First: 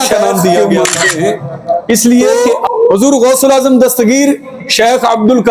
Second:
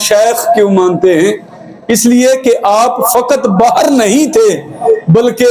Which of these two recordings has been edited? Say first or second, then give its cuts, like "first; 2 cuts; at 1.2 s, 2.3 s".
first; 1 cut; at 2.6 s